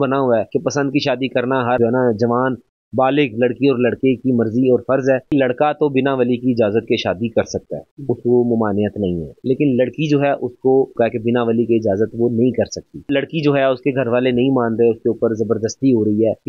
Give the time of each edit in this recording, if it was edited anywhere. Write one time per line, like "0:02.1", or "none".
0:05.3
0:09.3
0:10.9
0:13.0

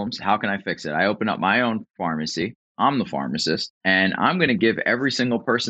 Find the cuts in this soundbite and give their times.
0:03.7

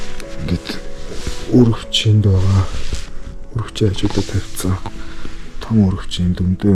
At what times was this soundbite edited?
none

